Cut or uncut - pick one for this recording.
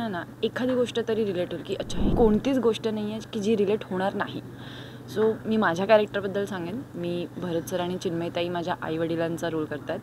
cut